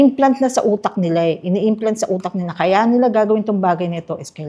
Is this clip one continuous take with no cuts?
yes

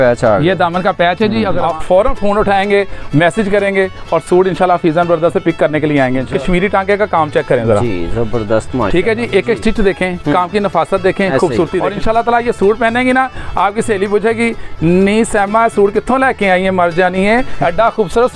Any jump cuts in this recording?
yes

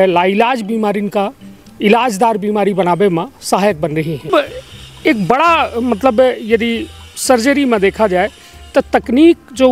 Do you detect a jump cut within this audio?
yes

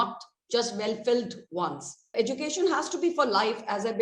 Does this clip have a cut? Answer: yes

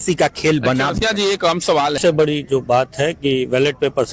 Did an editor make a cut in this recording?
yes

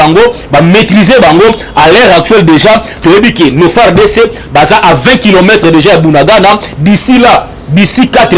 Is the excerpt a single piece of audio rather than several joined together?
yes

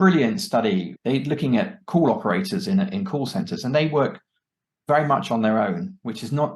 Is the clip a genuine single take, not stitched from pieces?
no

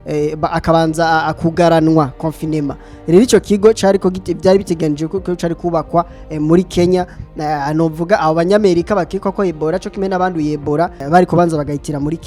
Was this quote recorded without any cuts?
no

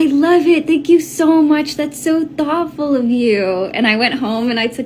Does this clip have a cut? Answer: yes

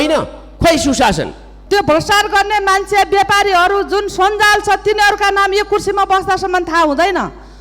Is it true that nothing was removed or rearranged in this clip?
no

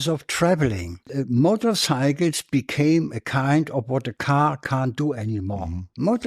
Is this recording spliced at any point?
yes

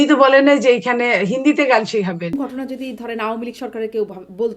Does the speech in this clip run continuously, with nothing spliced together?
no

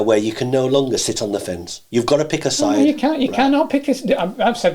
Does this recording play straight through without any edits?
yes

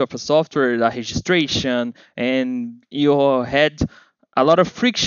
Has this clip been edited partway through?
yes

